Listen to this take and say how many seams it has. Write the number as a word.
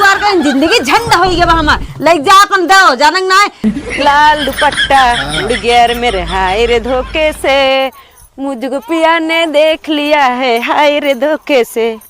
one